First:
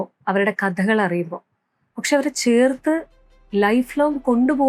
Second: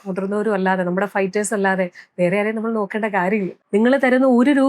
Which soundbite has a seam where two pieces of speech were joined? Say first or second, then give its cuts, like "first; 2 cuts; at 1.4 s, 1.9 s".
second; 1 cut; at 3.6 s